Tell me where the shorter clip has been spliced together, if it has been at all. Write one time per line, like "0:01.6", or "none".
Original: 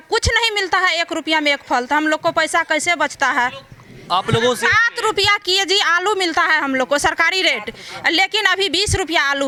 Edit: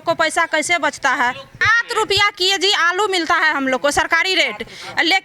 0:01.8